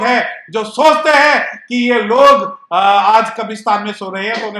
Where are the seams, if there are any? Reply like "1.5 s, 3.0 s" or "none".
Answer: none